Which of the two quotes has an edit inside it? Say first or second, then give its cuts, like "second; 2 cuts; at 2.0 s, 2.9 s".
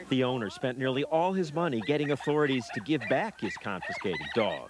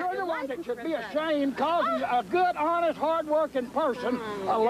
second; 1 cut; at 3.5 s